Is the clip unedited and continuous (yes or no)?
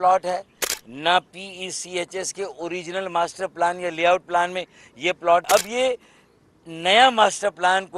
no